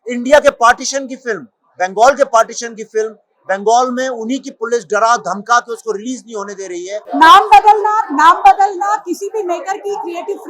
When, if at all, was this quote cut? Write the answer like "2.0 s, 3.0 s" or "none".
7.0 s